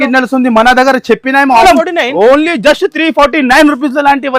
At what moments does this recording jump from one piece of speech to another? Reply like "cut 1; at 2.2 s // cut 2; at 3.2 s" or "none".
cut 1; at 1.6 s